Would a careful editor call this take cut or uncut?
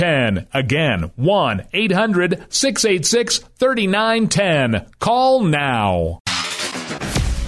cut